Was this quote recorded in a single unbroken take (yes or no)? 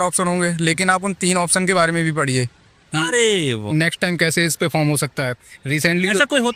yes